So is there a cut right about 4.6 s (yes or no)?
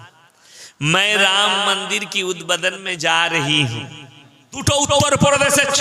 yes